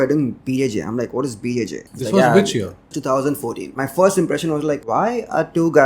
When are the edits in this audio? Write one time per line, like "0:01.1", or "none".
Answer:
0:01.9
0:02.9
0:03.7
0:04.8